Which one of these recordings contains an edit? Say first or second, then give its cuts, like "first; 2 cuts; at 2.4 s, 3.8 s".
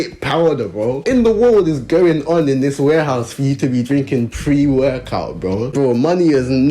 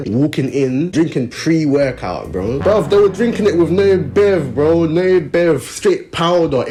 first; 1 cut; at 5.7 s